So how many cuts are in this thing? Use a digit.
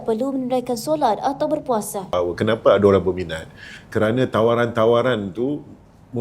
1